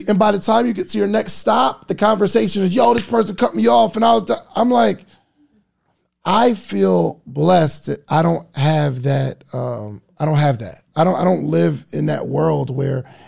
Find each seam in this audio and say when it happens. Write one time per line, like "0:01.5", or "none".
0:10.8